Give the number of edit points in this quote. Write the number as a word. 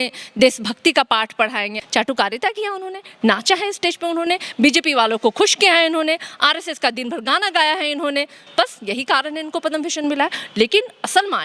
one